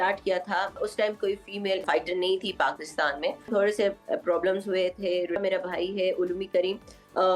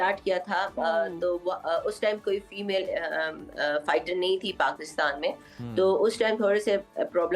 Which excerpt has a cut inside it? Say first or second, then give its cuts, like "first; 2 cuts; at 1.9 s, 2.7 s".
first; 4 cuts; at 0.8 s, 1.8 s, 3.5 s, 5.4 s